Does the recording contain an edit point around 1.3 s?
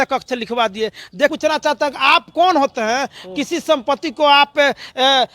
yes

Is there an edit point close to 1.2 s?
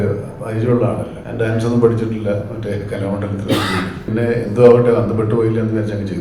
yes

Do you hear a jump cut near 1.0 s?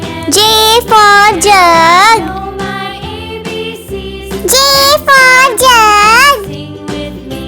no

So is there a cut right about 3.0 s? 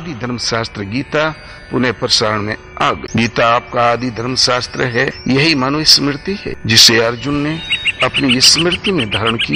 yes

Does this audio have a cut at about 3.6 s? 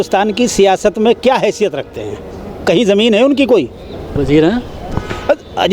no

